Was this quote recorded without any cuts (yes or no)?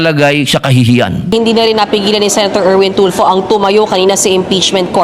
no